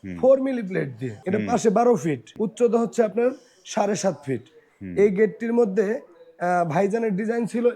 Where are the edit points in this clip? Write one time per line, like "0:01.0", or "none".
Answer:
0:01.1
0:02.3